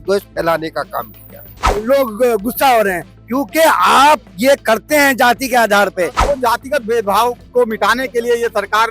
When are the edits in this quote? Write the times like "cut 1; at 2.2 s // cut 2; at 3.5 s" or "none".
cut 1; at 1.7 s // cut 2; at 6.2 s